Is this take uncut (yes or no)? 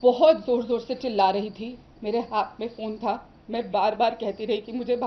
yes